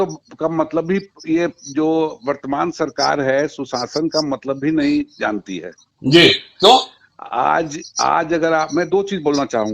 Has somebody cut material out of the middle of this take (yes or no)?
no